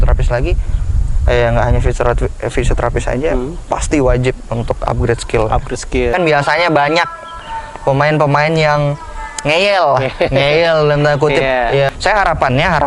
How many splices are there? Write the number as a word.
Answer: two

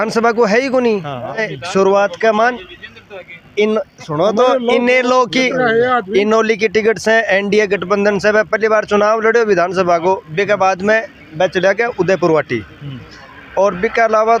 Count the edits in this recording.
one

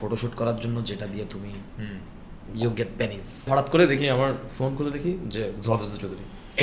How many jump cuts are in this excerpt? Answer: one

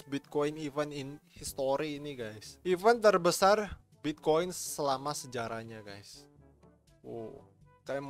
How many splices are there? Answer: zero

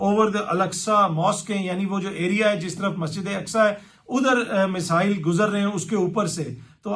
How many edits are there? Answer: zero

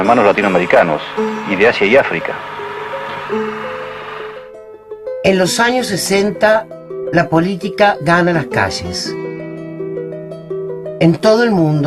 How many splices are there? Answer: one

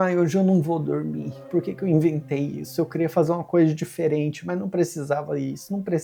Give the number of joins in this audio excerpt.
zero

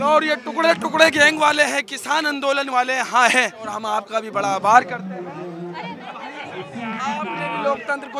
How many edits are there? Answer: one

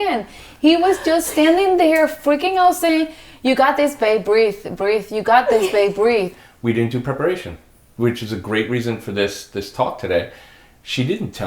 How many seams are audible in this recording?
one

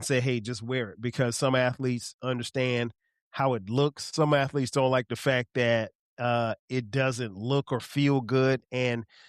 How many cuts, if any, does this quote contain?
zero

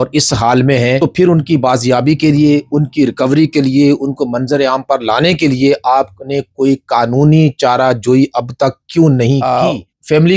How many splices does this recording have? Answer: two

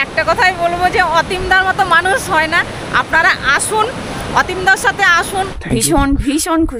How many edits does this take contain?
one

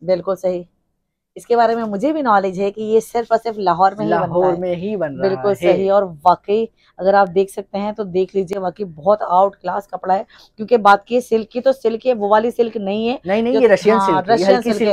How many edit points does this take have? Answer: zero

